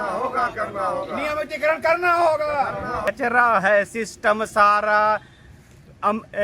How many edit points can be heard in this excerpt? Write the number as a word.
one